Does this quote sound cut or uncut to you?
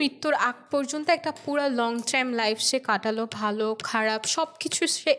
uncut